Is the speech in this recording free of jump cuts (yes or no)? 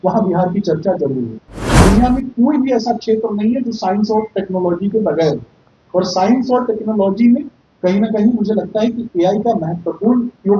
no